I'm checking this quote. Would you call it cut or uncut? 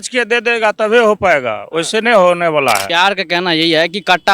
cut